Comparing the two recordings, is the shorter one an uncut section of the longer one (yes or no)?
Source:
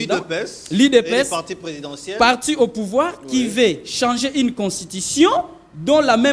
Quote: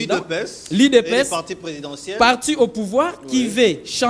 yes